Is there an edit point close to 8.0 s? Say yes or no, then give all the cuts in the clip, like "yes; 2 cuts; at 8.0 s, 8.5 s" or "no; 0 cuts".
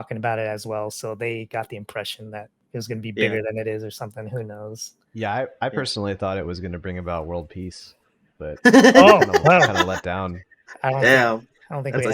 no; 1 cut; at 2.6 s